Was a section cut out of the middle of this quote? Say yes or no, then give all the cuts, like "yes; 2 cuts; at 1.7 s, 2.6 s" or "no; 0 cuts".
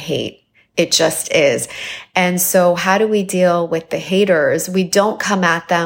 no; 0 cuts